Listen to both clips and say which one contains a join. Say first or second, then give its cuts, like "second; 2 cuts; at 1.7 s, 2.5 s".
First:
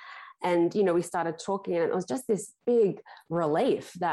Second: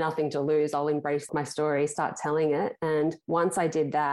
second; 2 cuts; at 1.3 s, 3.2 s